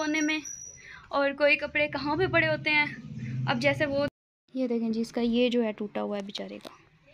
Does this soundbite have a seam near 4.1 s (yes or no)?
yes